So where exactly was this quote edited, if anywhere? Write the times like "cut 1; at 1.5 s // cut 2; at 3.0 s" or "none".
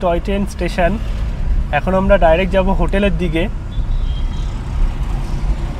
none